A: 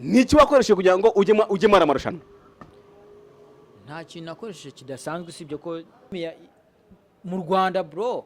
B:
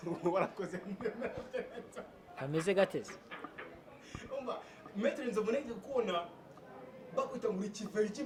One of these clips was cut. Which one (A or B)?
A